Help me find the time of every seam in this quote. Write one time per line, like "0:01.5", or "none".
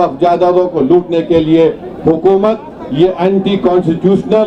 none